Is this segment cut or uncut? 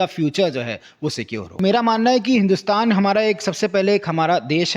cut